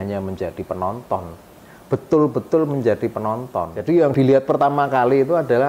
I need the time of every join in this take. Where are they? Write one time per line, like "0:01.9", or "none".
0:04.1